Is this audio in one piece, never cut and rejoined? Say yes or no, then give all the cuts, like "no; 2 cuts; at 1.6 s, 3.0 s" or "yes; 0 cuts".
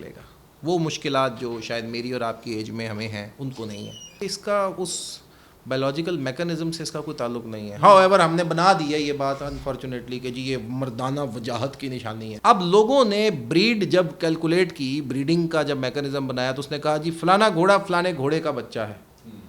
no; 2 cuts; at 4.2 s, 12.3 s